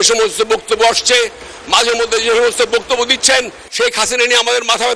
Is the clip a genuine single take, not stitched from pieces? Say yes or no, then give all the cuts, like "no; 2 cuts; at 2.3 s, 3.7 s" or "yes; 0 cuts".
no; 1 cut; at 3.6 s